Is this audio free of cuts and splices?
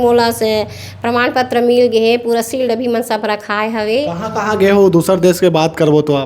no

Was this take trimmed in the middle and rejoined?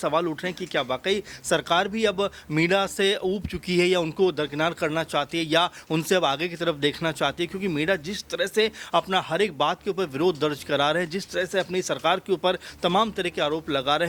no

